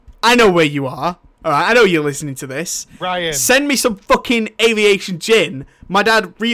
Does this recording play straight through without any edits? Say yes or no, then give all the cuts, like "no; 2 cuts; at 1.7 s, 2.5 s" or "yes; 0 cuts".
yes; 0 cuts